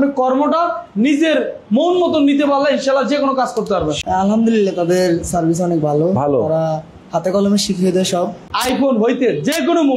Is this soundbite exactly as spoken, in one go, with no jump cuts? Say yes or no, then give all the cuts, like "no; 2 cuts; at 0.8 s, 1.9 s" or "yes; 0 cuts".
no; 2 cuts; at 4.0 s, 8.5 s